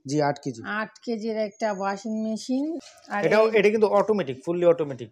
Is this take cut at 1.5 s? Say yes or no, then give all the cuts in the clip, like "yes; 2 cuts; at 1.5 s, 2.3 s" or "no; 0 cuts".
no; 1 cut; at 2.9 s